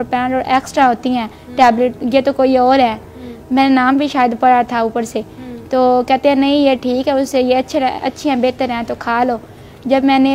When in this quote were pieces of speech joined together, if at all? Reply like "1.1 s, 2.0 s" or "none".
none

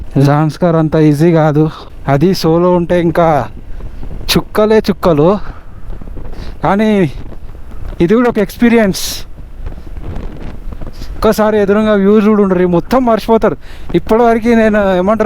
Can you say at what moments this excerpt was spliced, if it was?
1.9 s

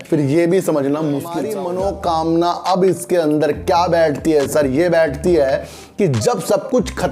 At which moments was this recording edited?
1.5 s

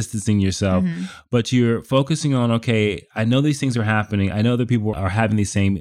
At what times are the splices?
4.9 s

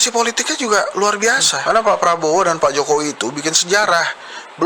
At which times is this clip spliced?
1.5 s

